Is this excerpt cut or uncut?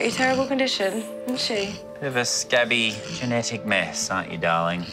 uncut